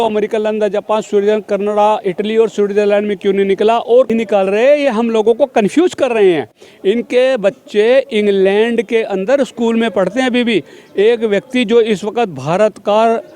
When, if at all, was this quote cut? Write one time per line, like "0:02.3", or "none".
0:04.1